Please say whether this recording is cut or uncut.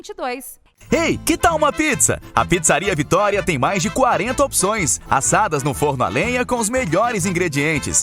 cut